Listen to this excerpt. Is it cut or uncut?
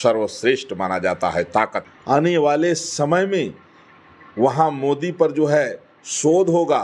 cut